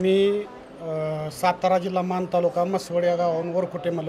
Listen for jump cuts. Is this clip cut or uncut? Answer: uncut